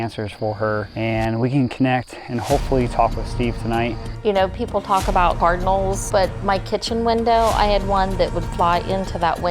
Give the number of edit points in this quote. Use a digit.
3